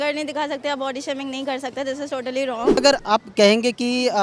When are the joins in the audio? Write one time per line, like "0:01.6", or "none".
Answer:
0:02.8